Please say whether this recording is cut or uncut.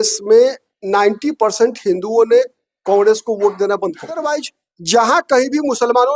cut